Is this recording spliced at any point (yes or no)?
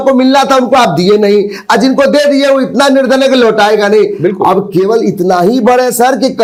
no